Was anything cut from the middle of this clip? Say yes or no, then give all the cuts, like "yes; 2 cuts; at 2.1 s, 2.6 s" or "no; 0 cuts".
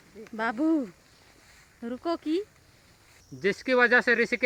no; 0 cuts